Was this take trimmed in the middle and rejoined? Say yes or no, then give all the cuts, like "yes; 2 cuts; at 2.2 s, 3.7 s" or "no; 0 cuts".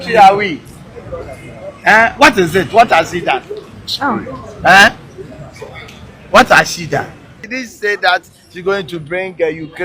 yes; 1 cut; at 7.5 s